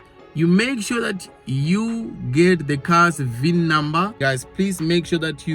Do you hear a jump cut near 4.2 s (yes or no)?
yes